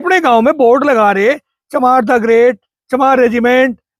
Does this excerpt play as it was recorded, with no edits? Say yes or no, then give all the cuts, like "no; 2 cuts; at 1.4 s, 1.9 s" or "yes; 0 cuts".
yes; 0 cuts